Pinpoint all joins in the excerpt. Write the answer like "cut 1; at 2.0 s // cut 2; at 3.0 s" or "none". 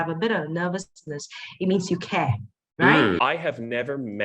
cut 1; at 3.2 s